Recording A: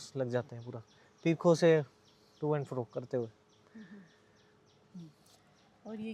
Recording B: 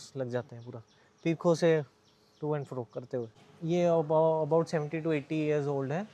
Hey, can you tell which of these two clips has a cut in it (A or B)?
B